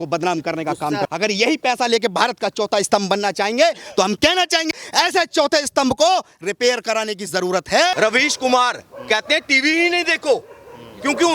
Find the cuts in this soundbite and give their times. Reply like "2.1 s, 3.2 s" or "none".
1.1 s, 4.8 s, 7.9 s

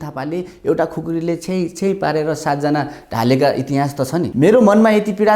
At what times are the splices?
4.3 s

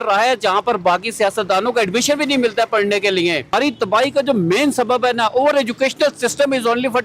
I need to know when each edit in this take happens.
3.5 s

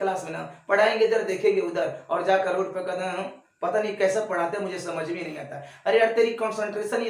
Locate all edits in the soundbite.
none

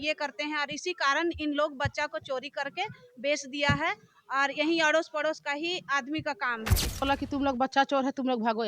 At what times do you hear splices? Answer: 7.0 s

